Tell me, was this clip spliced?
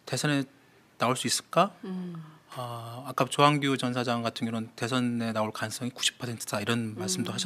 no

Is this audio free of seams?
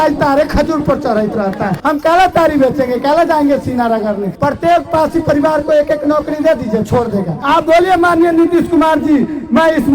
no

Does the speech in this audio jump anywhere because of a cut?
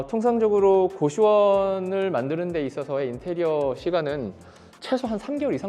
no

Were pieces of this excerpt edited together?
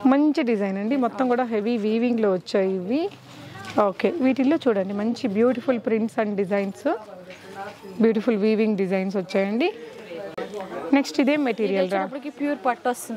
no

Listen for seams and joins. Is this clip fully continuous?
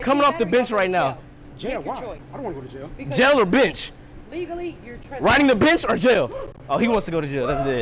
yes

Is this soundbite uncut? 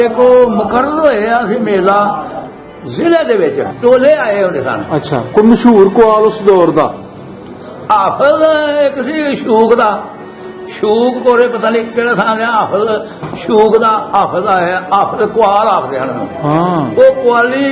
no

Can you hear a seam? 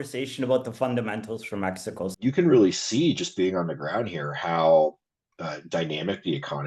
yes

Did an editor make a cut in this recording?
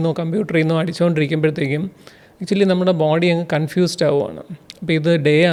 no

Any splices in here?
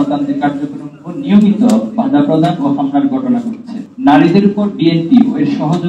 yes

